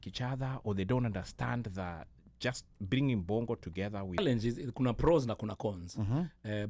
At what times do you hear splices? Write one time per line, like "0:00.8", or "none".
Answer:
0:04.2